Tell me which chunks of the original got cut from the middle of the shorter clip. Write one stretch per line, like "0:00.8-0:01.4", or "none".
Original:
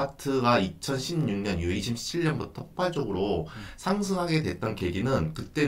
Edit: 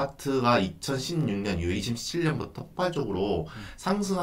none